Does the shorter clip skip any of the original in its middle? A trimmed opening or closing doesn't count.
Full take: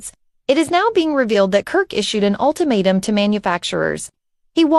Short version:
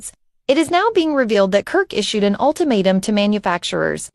no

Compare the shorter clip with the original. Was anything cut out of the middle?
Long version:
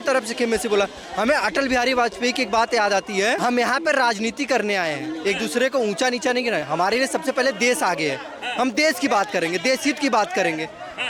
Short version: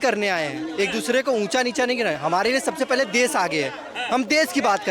no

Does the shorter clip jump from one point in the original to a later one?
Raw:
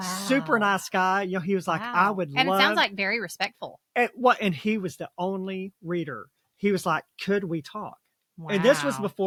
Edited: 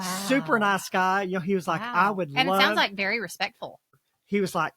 yes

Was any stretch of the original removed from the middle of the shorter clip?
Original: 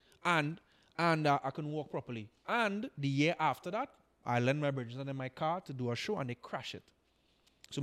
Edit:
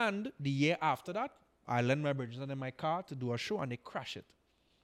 no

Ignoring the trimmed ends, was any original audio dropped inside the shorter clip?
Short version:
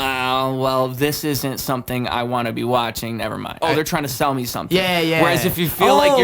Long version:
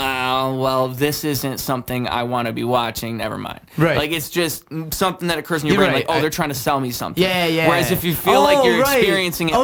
yes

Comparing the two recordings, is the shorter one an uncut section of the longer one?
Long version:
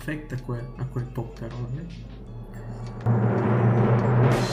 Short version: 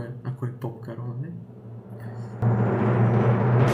no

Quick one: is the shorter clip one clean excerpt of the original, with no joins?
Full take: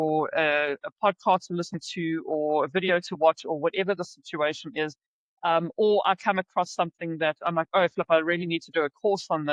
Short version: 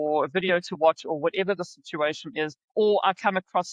no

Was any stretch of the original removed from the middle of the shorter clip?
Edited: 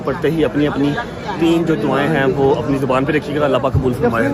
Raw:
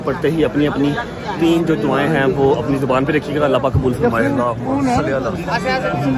no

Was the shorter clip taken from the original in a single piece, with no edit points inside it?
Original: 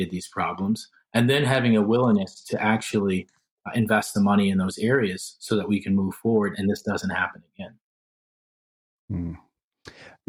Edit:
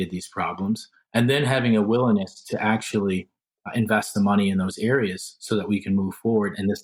yes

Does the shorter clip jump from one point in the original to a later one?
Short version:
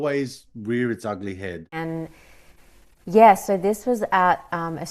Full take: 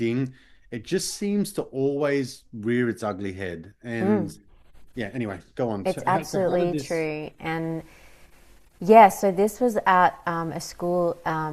yes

